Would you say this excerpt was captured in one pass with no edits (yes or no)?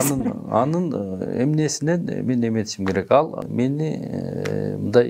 no